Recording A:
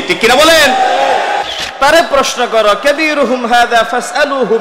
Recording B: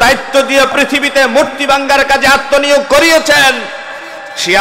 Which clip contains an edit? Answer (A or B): A